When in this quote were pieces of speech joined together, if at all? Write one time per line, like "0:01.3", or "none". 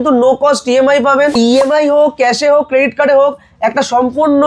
0:01.4